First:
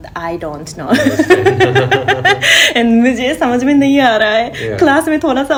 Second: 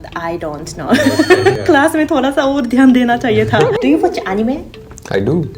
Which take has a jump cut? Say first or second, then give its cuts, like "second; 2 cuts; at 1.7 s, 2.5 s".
second; 2 cuts; at 1.6 s, 3.7 s